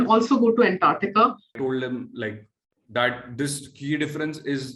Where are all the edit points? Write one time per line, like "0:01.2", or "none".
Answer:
0:01.5